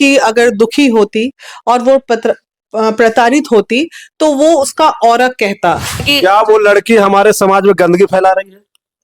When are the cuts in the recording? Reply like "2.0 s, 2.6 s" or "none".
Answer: 6.1 s